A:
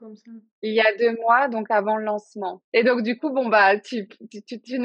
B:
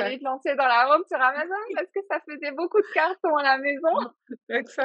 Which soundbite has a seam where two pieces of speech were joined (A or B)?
A